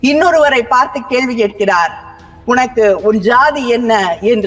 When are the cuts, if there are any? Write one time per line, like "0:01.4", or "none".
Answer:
none